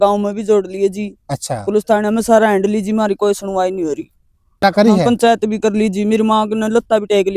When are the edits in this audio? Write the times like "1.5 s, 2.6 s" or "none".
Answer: 4.6 s